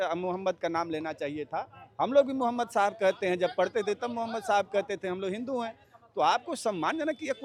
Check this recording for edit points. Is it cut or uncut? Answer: uncut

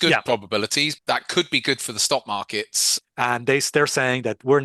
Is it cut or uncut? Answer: cut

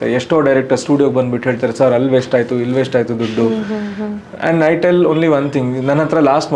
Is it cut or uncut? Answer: uncut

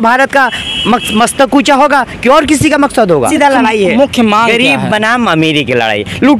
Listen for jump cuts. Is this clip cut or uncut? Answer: cut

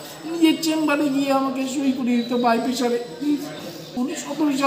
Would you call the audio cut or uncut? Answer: cut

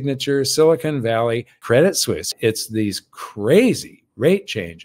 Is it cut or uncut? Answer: cut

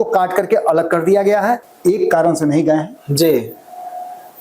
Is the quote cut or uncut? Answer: cut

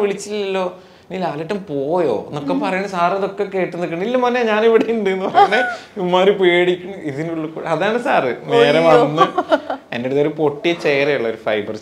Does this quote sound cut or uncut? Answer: uncut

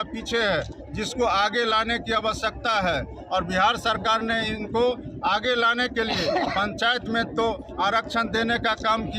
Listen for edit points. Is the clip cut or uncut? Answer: uncut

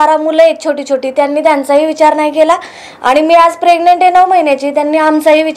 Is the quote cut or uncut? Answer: uncut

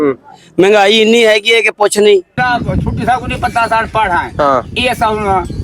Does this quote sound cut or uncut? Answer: cut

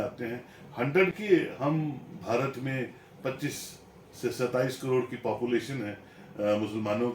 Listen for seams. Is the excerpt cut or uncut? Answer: cut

